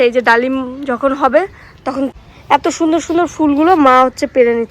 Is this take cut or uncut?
cut